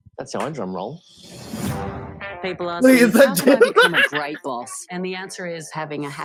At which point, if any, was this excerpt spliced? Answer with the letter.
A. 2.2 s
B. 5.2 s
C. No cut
C